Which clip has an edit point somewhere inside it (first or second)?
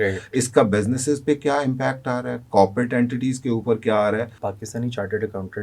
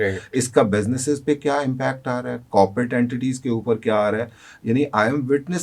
first